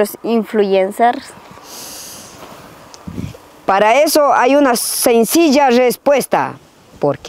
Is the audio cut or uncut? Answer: uncut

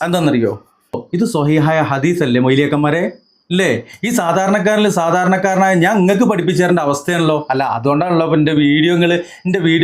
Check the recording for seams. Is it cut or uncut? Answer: cut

